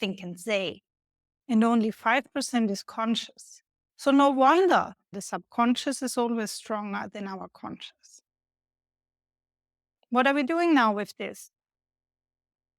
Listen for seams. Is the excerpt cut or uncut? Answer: cut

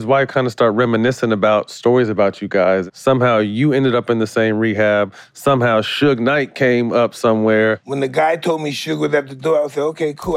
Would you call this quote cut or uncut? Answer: cut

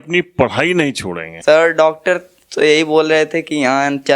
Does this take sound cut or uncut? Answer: cut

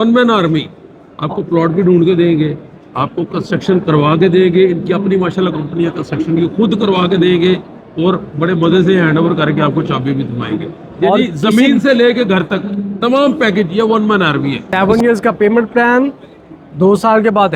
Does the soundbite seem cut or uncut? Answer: cut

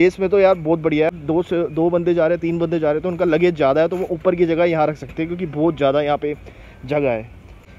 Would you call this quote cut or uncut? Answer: uncut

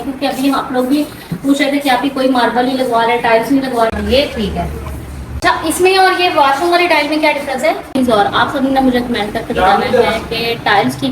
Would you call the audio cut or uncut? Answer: cut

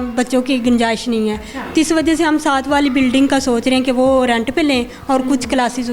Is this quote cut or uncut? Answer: uncut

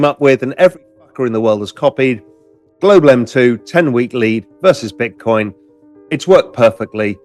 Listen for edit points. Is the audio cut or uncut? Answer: uncut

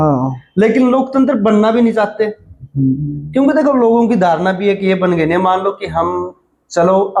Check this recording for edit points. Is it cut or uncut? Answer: uncut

